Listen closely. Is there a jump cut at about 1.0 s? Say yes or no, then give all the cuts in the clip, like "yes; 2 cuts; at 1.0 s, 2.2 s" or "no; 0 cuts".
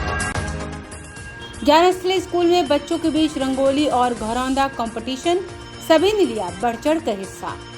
no; 0 cuts